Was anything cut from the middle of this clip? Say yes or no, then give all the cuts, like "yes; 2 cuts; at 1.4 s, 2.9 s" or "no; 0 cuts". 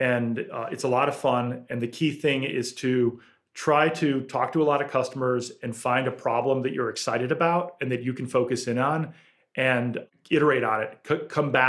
yes; 1 cut; at 10.0 s